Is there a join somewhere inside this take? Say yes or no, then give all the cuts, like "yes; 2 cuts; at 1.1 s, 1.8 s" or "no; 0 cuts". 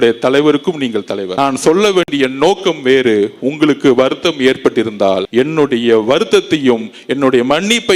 yes; 2 cuts; at 1.2 s, 5.3 s